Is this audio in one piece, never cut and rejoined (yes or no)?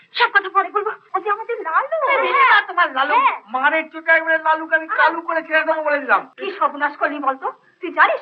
no